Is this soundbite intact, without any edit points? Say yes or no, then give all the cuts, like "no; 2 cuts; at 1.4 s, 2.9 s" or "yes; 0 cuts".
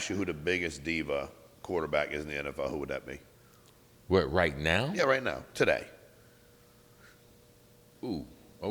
yes; 0 cuts